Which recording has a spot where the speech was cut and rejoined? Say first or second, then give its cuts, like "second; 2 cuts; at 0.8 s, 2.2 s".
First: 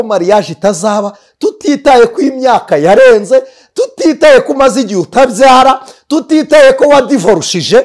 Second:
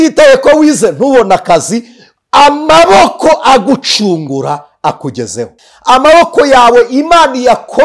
second; 1 cut; at 5.7 s